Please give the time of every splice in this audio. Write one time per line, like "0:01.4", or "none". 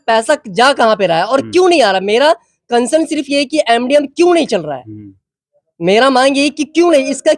none